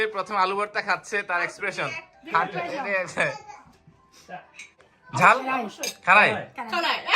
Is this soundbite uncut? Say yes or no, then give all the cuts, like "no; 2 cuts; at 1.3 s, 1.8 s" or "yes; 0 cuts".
no; 1 cut; at 4.9 s